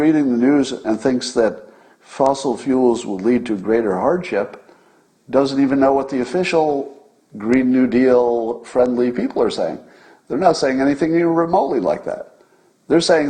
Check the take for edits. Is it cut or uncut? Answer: uncut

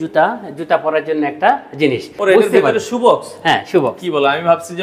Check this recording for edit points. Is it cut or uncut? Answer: cut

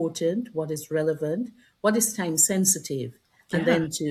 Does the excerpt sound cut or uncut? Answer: uncut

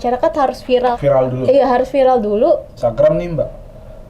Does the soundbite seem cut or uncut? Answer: cut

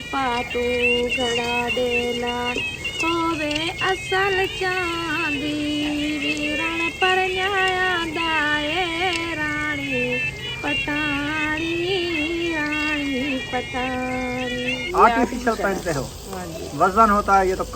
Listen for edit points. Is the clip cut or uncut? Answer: cut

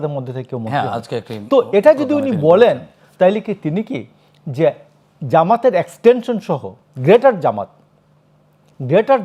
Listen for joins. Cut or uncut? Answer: uncut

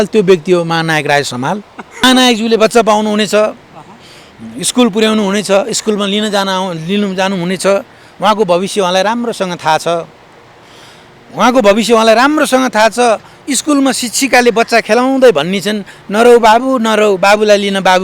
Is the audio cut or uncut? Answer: cut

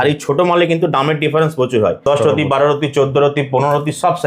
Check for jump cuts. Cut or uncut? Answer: cut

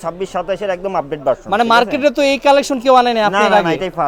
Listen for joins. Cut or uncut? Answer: uncut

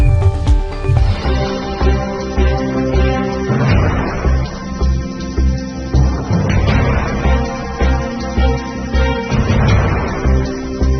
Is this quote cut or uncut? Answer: cut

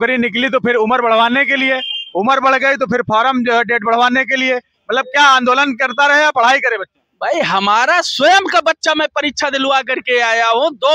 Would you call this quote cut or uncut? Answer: uncut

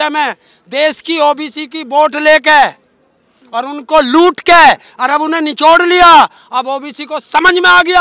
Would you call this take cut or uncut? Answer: uncut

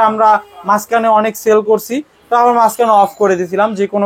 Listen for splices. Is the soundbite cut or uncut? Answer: uncut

